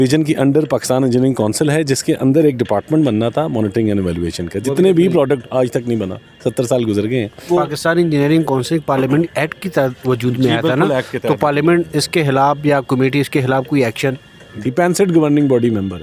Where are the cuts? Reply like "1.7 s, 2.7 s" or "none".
7.4 s, 14.5 s